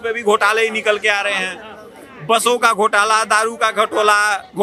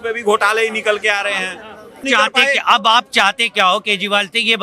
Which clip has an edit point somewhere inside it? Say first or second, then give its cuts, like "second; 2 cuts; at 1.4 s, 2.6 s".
second; 1 cut; at 2.0 s